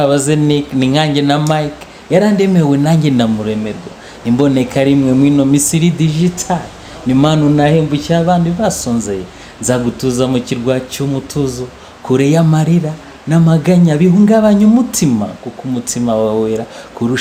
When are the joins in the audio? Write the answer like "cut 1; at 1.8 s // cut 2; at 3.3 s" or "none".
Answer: none